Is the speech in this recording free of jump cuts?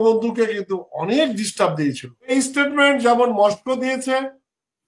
no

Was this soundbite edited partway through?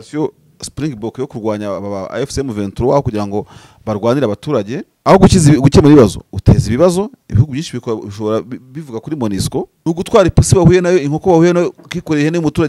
yes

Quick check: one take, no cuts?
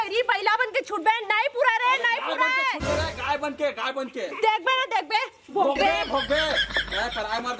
yes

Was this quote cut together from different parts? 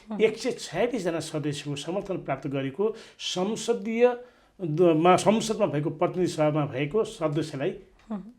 no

